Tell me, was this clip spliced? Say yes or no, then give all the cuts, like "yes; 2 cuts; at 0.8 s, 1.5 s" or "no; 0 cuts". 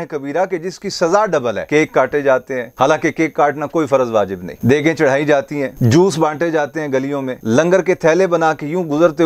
yes; 2 cuts; at 1.6 s, 5.7 s